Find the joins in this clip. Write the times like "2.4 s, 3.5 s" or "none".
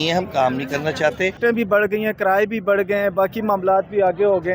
1.4 s